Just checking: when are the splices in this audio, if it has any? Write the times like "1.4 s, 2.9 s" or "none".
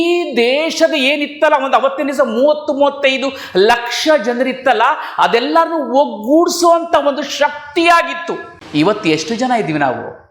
none